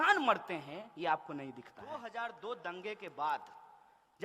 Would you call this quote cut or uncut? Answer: cut